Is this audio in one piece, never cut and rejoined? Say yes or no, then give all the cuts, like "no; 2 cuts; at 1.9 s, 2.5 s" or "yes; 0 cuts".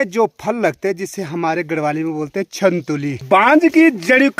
no; 1 cut; at 3.2 s